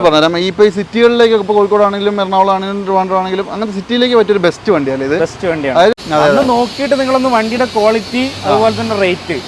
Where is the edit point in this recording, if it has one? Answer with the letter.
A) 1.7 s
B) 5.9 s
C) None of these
B